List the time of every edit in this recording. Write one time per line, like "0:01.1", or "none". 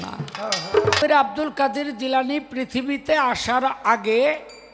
0:01.0